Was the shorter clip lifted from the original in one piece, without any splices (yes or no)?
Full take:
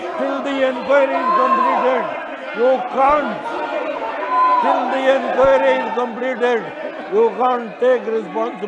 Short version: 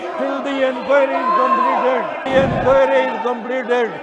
no